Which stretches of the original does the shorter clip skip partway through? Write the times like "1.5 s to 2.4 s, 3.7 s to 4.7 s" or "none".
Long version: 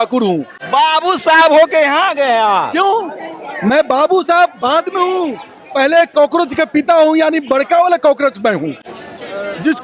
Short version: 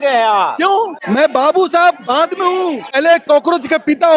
3.1 s to 3.5 s, 5.5 s to 5.8 s

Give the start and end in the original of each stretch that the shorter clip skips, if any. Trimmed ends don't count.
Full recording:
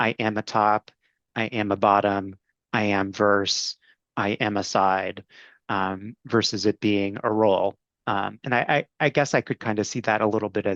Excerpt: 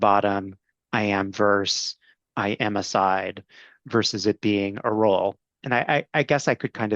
5.5 s to 6.1 s, 8.4 s to 8.9 s

